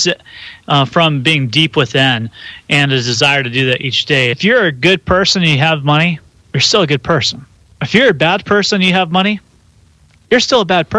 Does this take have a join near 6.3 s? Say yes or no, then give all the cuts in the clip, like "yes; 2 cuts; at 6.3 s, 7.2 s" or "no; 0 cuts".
no; 1 cut; at 4.4 s